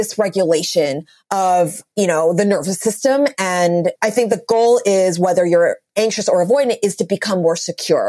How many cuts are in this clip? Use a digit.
2